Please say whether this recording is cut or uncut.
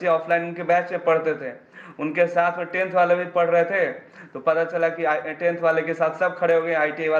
uncut